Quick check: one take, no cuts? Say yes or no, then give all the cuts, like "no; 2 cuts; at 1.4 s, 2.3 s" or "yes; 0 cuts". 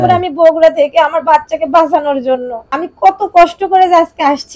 no; 1 cut; at 2.6 s